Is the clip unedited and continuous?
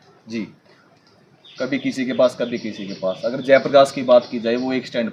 yes; 0 cuts

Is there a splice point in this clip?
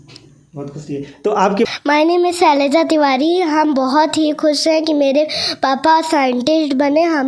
yes; 1 cut; at 1.7 s

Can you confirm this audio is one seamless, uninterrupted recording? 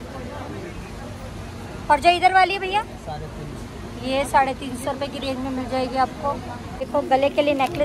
no; 1 cut; at 6.9 s

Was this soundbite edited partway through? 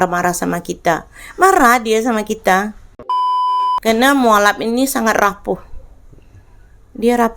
yes; 1 cut; at 3.3 s

